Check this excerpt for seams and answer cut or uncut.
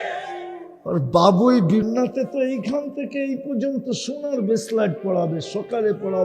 cut